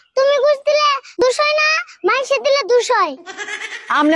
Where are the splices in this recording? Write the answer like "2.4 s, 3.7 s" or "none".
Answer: 1.2 s

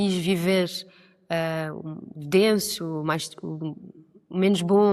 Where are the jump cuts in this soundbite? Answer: none

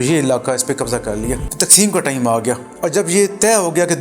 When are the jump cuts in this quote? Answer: 1.4 s

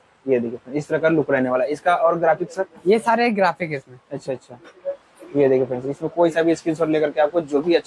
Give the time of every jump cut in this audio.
none

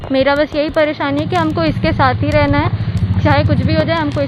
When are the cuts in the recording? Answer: none

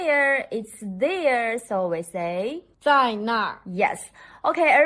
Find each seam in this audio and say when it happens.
2.7 s

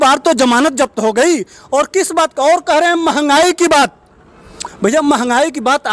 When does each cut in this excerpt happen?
none

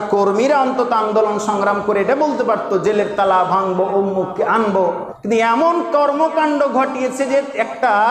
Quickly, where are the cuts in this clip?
5.1 s

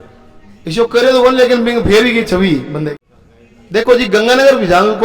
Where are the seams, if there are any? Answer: 2.9 s

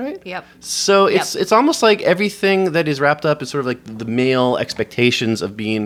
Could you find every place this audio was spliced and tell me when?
none

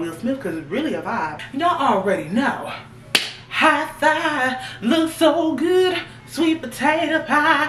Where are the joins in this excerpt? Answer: 1.4 s

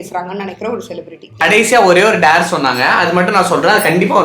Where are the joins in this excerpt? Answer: 1.4 s, 2.9 s

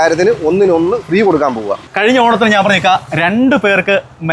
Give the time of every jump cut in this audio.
1.8 s

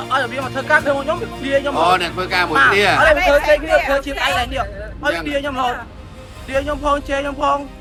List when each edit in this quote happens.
none

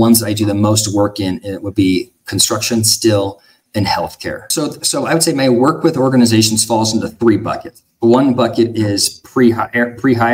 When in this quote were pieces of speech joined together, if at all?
4.4 s

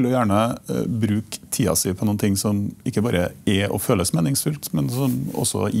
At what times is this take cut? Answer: none

